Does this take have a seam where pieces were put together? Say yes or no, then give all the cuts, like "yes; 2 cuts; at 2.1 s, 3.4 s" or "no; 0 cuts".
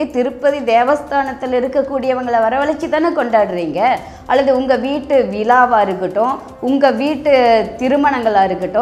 no; 0 cuts